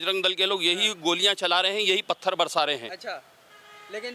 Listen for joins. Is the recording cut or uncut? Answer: uncut